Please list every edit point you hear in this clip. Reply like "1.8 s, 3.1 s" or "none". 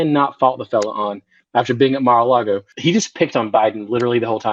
2.7 s